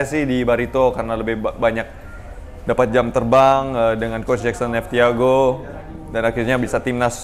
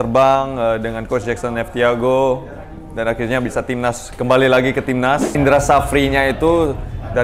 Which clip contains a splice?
second; 1 cut; at 5.3 s

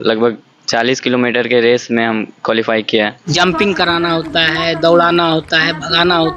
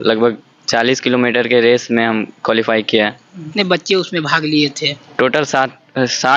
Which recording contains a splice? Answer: first; 1 cut; at 3.3 s

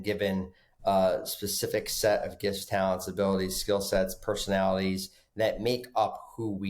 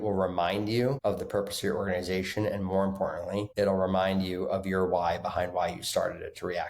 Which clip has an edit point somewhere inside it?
second; 2 cuts; at 1.0 s, 3.5 s

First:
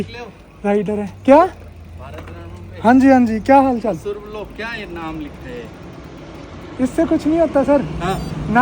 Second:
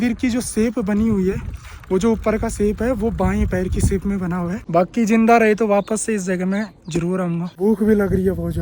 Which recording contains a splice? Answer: second; 2 cuts; at 4.6 s, 7.5 s

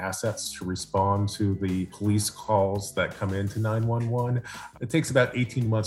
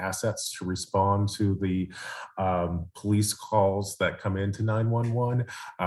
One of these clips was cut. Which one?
first; 2 cuts; at 1.9 s, 4.6 s

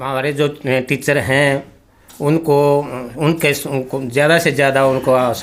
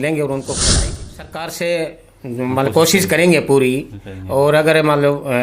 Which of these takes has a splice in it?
second; 1 cut; at 1.0 s

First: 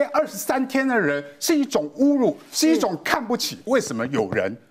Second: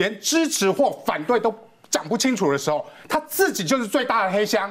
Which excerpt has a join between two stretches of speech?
first; 1 cut; at 3.6 s

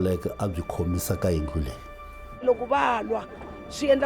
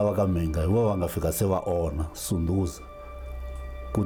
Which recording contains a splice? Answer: first; 1 cut; at 2.4 s

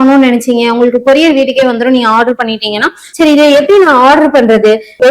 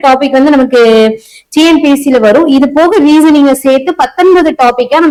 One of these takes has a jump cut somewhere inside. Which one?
first; 1 cut; at 3.0 s

